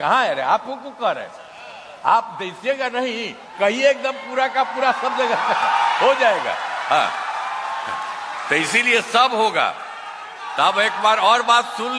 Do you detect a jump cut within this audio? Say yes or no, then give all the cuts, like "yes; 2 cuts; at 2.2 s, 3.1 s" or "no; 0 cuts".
no; 0 cuts